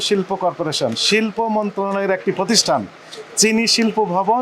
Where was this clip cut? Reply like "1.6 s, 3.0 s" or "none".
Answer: none